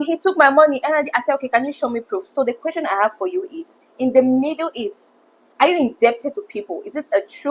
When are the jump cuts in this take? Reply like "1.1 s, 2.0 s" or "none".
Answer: none